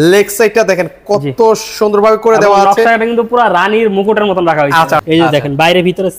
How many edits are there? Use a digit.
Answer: 1